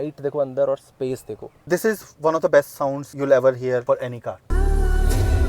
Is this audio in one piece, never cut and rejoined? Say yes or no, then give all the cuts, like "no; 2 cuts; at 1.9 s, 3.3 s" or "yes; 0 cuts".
no; 2 cuts; at 1.5 s, 4.5 s